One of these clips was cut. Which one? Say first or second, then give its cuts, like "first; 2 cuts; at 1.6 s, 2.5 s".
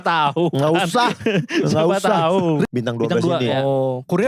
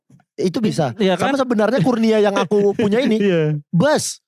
first; 1 cut; at 2.6 s